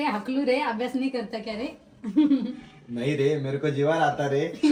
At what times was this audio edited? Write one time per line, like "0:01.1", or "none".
none